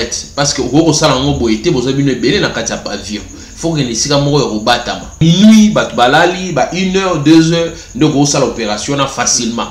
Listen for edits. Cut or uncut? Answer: cut